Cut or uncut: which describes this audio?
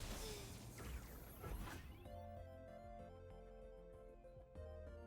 uncut